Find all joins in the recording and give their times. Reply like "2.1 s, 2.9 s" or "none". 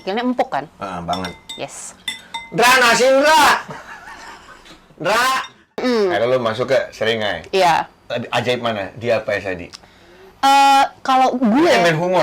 5.8 s